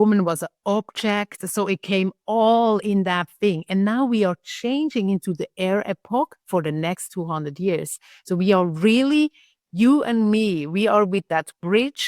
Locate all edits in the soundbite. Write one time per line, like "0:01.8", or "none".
none

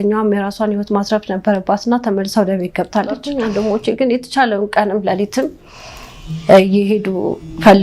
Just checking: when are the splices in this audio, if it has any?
0:03.3

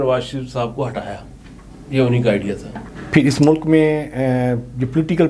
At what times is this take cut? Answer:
none

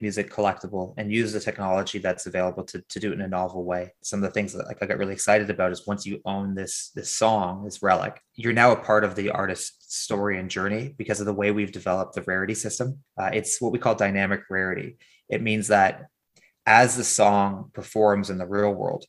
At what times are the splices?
0:04.0
0:08.2
0:13.0

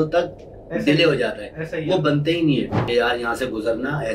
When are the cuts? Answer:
0:02.8

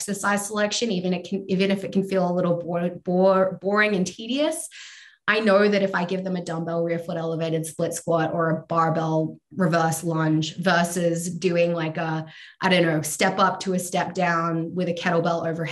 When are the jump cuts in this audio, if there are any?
none

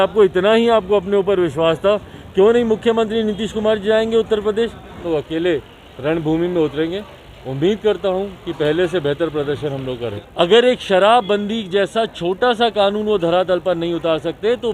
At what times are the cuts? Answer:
0:05.0
0:10.2

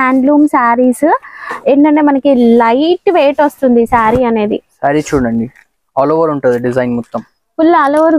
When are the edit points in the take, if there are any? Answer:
none

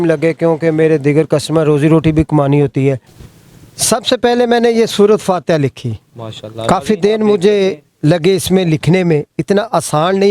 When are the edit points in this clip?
0:03.1

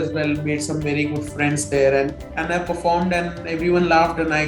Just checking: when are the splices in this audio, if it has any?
0:02.2

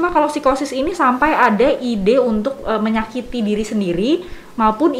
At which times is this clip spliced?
none

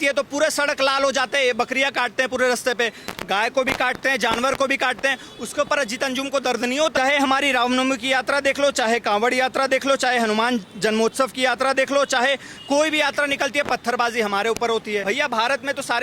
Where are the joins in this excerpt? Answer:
0:06.9
0:15.0

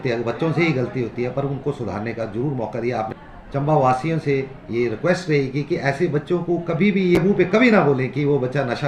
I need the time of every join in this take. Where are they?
0:03.1
0:07.2

